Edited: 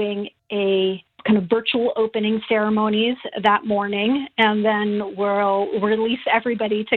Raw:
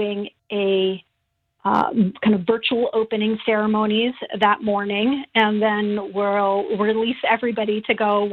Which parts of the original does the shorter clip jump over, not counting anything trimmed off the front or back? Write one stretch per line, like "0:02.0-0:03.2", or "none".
0:01.2-0:02.2